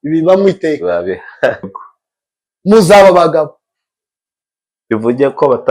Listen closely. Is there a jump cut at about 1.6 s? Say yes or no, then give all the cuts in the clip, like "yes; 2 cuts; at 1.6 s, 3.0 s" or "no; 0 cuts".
yes; 1 cut; at 1.6 s